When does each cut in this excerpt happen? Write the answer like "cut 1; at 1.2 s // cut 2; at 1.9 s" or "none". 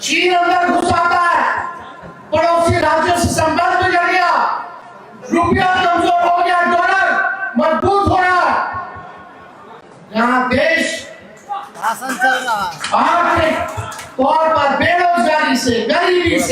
none

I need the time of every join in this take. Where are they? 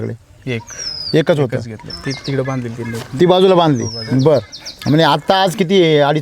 cut 1; at 1.8 s

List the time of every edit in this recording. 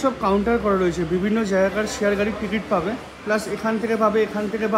none

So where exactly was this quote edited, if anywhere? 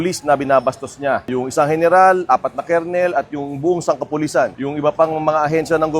cut 1; at 1.2 s // cut 2; at 4.5 s

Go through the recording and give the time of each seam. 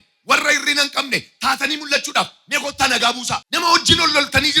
cut 1; at 3.5 s

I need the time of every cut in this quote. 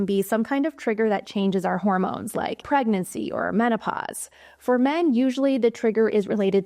cut 1; at 2.6 s

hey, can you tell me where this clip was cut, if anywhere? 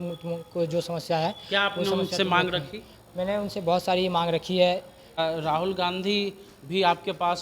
cut 1; at 5.2 s

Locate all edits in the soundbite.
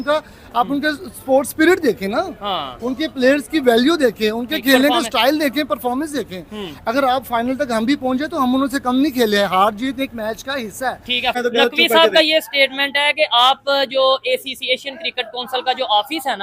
cut 1; at 11.3 s

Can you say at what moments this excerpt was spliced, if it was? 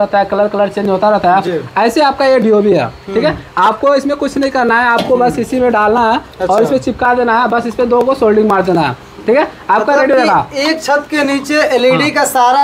none

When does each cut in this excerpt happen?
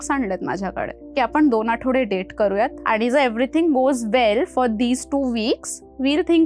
cut 1; at 2.8 s

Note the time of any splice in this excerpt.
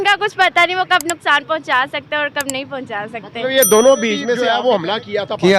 cut 1; at 4.3 s

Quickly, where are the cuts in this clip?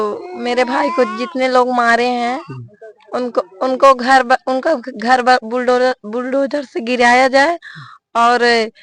none

